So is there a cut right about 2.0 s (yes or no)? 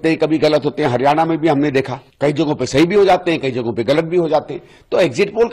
yes